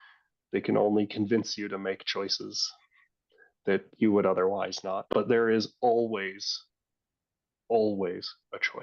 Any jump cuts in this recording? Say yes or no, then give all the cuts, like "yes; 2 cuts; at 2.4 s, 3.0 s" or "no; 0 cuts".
yes; 1 cut; at 5.0 s